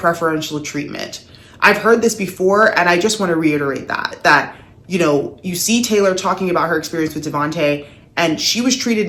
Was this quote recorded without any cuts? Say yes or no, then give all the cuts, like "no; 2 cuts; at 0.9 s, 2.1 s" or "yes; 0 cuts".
yes; 0 cuts